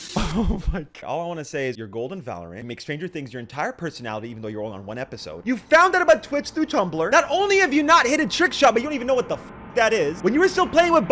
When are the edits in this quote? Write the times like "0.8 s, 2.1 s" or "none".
0.9 s